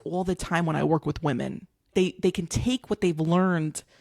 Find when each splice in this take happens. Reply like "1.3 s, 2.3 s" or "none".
1.9 s